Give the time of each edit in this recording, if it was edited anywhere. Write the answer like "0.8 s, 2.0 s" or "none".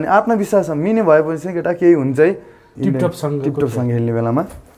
2.7 s